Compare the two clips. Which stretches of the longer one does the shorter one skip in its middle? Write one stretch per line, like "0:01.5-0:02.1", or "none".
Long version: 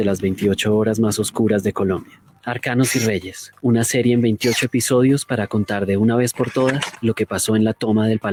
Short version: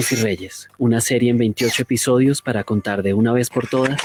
none